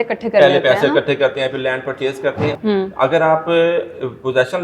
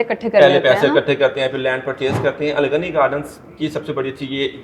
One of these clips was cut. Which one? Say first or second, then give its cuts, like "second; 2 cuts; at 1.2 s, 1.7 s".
first; 1 cut; at 2.5 s